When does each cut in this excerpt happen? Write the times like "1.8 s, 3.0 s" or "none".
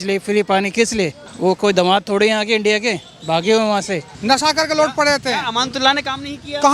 1.2 s, 4.1 s